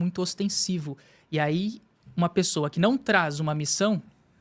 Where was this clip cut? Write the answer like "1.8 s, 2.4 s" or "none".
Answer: none